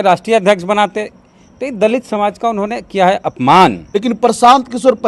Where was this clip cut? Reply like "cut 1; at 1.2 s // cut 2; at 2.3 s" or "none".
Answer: none